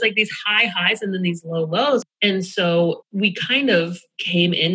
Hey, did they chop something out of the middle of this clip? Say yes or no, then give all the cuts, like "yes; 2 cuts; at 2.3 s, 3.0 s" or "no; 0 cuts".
yes; 2 cuts; at 2.1 s, 3.1 s